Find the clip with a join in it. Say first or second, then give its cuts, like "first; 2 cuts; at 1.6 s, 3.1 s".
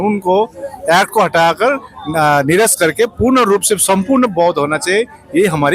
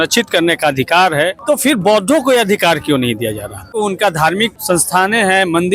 second; 3 cuts; at 1.4 s, 3.7 s, 4.6 s